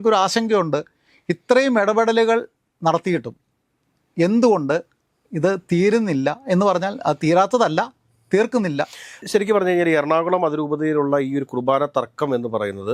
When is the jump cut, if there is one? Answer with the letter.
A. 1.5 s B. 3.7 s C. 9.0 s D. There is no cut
D